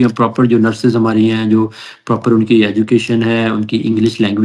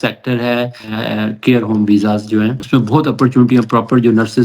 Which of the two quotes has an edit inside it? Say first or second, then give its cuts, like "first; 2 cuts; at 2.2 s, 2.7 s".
second; 2 cuts; at 0.9 s, 2.6 s